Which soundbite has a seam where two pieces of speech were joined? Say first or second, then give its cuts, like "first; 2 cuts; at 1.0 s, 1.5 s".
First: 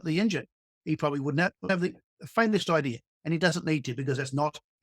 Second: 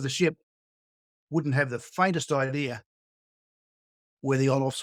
first; 1 cut; at 1.7 s